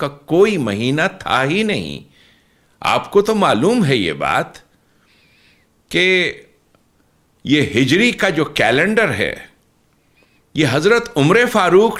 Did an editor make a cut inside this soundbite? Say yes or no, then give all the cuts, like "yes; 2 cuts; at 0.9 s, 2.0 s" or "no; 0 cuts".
no; 0 cuts